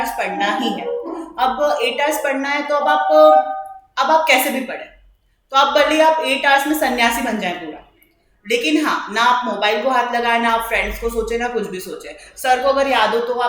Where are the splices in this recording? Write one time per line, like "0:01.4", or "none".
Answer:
none